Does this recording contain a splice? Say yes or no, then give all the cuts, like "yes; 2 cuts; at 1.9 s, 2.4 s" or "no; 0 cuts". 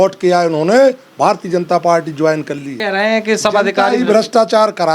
yes; 1 cut; at 2.8 s